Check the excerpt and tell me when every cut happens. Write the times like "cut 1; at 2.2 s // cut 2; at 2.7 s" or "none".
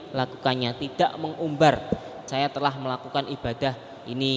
cut 1; at 2.2 s